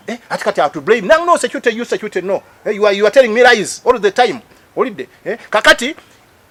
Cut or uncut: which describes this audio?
uncut